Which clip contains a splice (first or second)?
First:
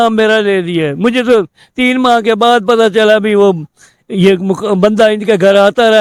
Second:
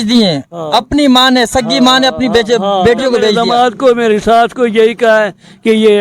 second